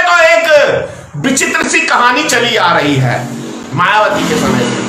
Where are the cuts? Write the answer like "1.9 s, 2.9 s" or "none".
none